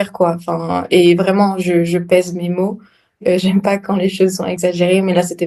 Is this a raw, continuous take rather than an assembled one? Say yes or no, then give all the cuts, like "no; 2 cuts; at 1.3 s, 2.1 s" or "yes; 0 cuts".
no; 2 cuts; at 3.2 s, 4.5 s